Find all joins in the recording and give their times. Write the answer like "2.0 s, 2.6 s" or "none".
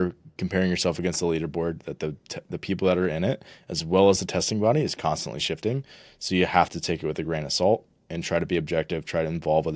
none